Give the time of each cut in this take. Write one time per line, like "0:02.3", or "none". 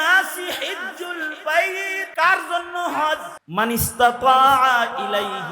0:02.0
0:03.4